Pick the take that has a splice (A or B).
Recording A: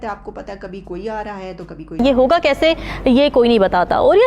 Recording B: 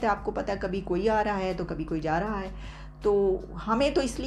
A